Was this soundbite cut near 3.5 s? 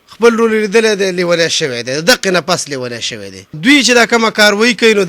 yes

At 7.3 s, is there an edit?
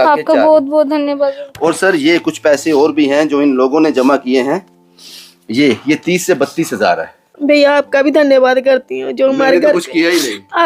yes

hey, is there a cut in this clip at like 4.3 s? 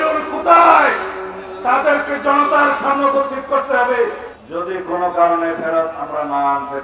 yes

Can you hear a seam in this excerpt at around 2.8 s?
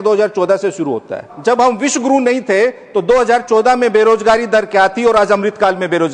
no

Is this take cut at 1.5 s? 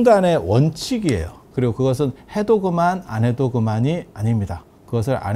yes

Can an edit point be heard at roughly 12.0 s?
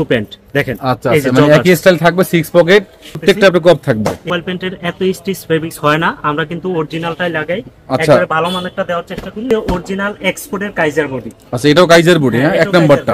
no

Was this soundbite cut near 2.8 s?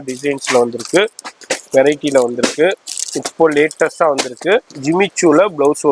no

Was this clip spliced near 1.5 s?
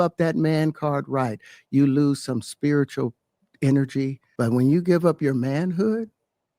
no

